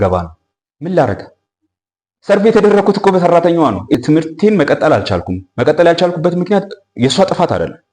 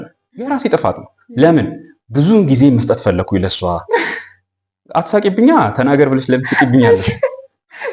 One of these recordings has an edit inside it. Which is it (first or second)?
first